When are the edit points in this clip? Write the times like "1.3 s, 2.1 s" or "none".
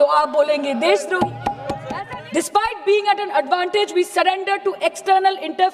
1.7 s